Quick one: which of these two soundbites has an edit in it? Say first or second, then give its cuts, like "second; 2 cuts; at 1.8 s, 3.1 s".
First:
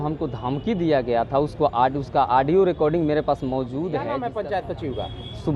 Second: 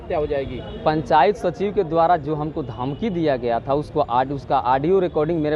first; 1 cut; at 4.2 s